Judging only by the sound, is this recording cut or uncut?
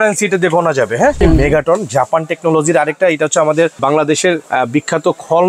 cut